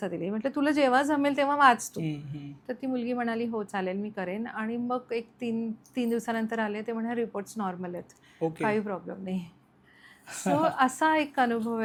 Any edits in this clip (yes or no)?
no